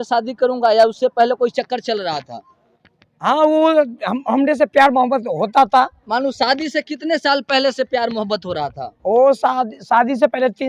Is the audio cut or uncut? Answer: uncut